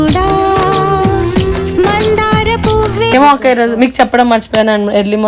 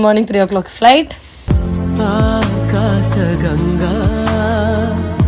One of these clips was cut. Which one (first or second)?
first